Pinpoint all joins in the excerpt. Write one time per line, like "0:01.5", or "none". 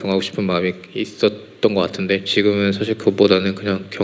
none